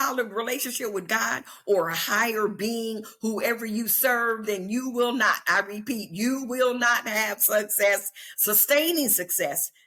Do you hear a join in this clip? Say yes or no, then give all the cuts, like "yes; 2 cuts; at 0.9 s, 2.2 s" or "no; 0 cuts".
no; 0 cuts